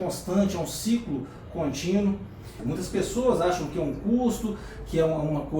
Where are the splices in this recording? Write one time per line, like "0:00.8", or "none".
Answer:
0:02.6